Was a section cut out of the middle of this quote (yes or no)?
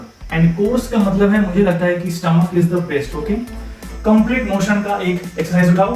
yes